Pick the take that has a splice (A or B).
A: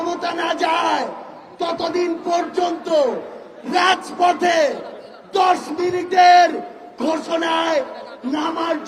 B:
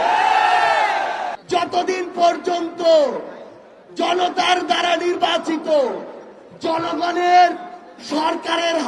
B